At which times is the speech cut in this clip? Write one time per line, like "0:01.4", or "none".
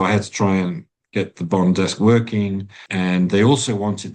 0:01.0
0:02.8